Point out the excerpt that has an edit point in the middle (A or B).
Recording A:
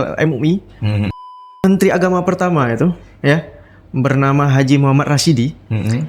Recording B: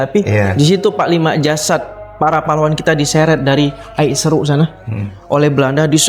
A